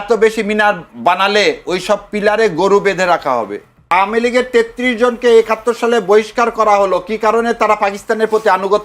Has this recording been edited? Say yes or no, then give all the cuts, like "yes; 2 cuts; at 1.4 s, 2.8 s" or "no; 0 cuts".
yes; 1 cut; at 3.9 s